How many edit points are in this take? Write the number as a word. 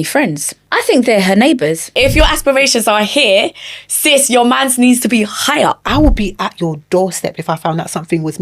two